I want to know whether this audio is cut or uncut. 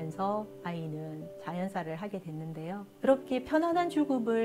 cut